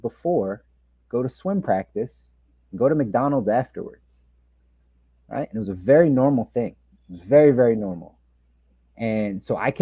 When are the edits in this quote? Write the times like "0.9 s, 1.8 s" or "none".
none